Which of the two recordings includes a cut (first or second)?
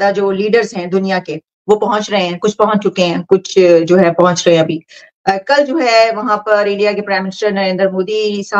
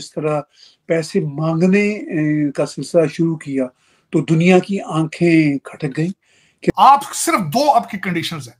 second